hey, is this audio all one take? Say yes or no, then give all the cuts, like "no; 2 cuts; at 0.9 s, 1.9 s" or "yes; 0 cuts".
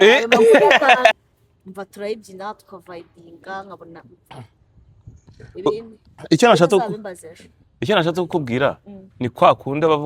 no; 1 cut; at 1.1 s